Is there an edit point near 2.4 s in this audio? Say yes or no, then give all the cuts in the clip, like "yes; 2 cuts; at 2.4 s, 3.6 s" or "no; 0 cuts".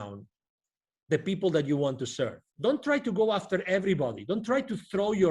yes; 1 cut; at 2.4 s